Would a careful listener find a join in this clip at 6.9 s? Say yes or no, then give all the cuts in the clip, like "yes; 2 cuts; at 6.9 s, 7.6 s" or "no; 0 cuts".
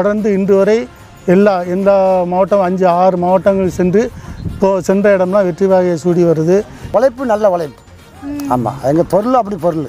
yes; 1 cut; at 6.9 s